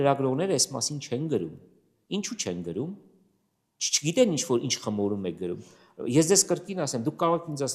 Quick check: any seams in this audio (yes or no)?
no